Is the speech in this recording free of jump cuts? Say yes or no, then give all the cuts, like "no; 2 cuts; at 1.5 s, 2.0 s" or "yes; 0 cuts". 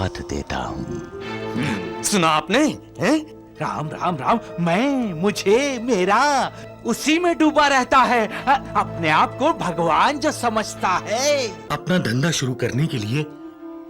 no; 1 cut; at 11.7 s